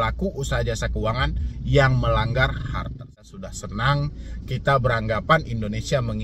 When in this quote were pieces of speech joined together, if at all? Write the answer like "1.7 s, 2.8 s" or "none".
3.1 s